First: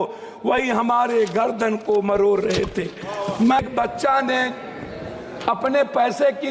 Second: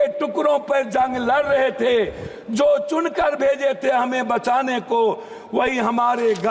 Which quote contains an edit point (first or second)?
first